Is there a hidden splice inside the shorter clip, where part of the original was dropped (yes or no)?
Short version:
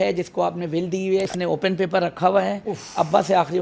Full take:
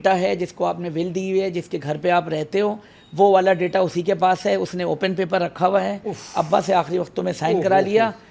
yes